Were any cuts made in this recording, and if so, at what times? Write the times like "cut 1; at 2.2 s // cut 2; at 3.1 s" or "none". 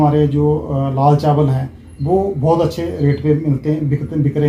none

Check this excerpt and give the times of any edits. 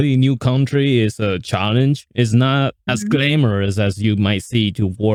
none

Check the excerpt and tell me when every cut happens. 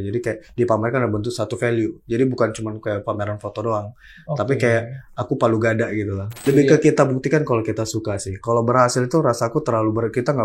cut 1; at 6.2 s

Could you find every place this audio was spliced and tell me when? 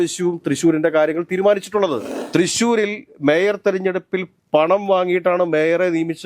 cut 1; at 2.1 s

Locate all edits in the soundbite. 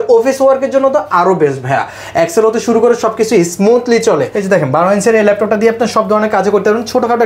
cut 1; at 4.4 s

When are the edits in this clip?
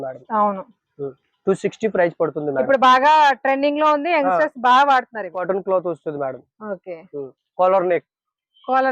cut 1; at 5.4 s

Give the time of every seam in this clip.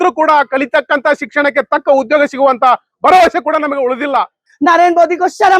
cut 1; at 4.4 s

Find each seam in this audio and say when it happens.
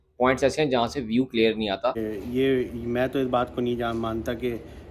cut 1; at 2.0 s

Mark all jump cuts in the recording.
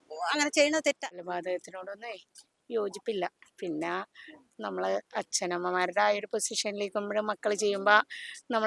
cut 1; at 1.2 s

